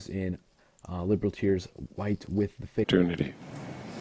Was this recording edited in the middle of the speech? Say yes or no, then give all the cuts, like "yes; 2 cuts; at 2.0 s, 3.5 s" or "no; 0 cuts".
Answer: no; 0 cuts